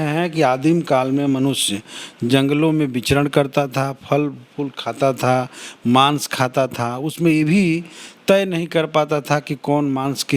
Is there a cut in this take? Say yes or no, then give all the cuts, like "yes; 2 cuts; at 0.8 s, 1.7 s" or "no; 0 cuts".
no; 0 cuts